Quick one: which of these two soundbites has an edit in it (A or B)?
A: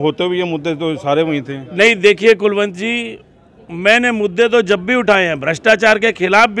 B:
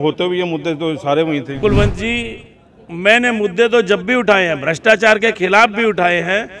B